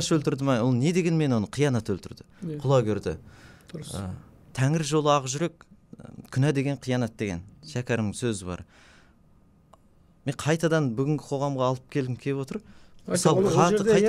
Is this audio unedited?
yes; 0 cuts

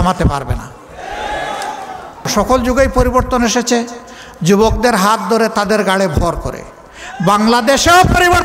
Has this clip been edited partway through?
yes; 1 cut; at 2.3 s

